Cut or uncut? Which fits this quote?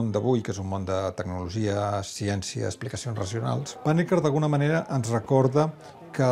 cut